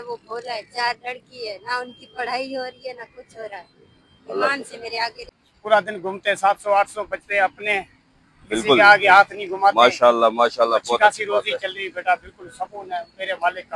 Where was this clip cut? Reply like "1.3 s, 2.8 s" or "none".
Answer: 5.2 s